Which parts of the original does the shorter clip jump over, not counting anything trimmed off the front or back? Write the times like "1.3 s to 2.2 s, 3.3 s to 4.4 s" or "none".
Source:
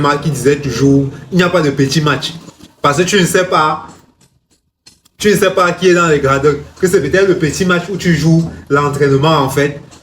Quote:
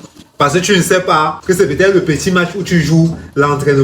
3.8 s to 6.7 s